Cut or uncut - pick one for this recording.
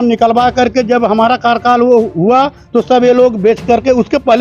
uncut